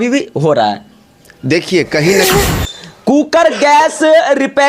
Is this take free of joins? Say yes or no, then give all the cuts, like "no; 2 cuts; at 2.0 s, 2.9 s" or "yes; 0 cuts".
no; 1 cut; at 2.4 s